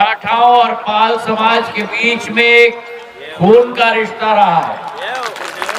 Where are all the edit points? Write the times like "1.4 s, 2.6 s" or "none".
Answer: none